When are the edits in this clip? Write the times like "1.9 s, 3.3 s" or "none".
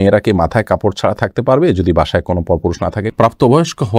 3.1 s